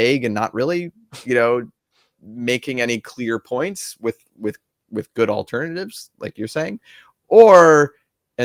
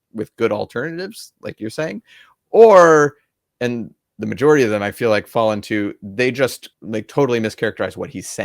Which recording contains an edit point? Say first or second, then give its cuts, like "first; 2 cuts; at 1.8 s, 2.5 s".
second; 1 cut; at 6.7 s